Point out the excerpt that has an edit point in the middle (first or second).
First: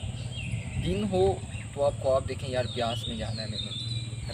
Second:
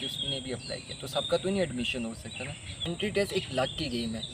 second